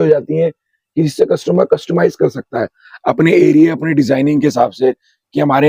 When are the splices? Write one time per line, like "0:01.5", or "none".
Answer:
none